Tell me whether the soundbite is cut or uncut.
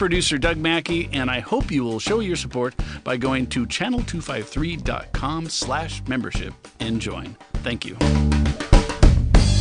uncut